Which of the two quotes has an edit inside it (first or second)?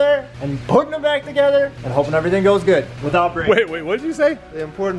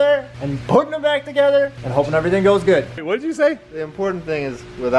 second